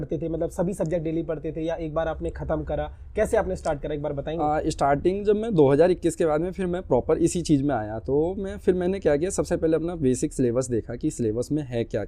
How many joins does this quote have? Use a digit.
0